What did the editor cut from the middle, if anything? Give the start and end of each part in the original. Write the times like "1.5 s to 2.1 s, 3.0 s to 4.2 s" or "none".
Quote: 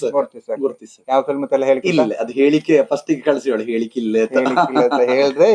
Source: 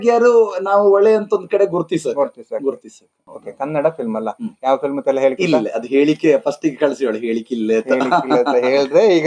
2.9 s to 4.5 s